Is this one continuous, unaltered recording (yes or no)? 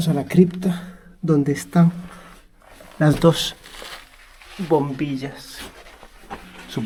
yes